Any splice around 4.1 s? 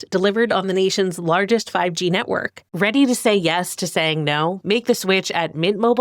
no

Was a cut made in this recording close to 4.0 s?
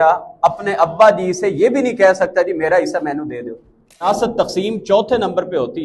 yes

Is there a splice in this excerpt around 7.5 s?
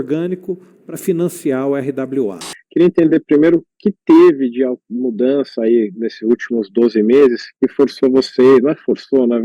yes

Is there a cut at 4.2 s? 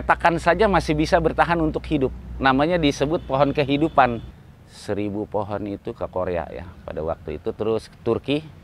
yes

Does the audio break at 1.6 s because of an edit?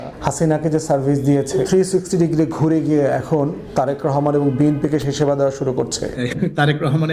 yes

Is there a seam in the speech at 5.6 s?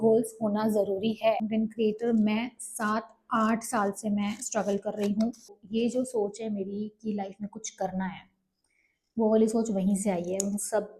yes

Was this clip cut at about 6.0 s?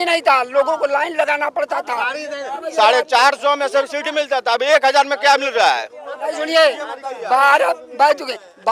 no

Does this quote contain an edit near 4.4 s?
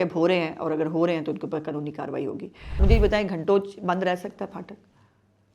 no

